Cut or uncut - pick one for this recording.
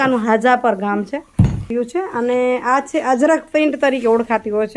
cut